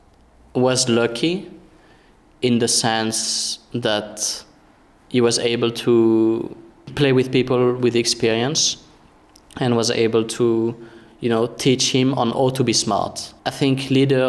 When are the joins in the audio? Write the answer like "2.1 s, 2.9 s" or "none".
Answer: 6.9 s, 13.2 s